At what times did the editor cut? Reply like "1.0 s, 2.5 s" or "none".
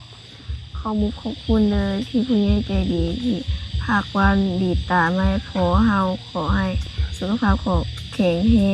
none